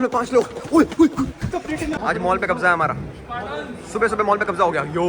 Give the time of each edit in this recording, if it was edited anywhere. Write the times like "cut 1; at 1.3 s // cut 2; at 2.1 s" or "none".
cut 1; at 2.0 s